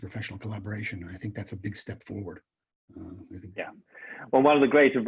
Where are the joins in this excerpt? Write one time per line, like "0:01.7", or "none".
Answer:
none